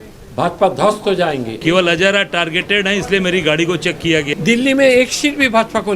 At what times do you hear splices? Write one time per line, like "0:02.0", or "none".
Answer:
0:01.5
0:04.3